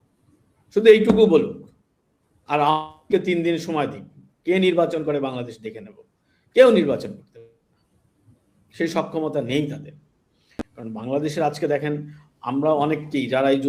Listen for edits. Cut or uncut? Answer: uncut